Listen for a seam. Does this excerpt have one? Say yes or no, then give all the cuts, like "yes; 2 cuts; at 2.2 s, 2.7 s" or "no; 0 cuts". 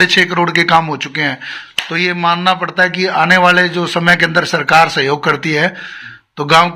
no; 0 cuts